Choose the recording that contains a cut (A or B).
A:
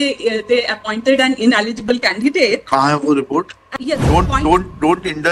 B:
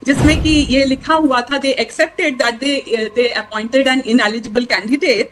A